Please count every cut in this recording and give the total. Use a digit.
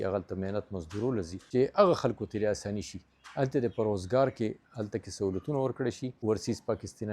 2